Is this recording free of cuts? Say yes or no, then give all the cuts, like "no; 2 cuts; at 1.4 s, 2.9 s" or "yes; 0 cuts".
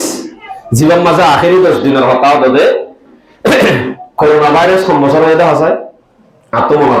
yes; 0 cuts